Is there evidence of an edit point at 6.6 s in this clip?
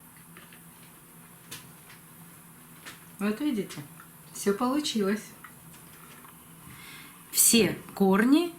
yes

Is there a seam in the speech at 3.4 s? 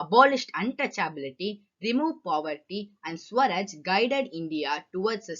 no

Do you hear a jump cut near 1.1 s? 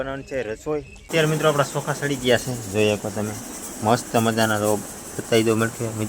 yes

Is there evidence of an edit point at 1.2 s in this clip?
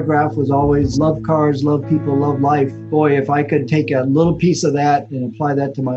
no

